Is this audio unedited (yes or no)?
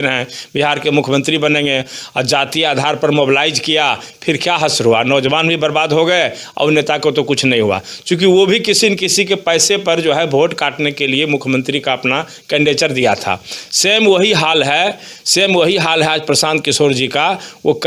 yes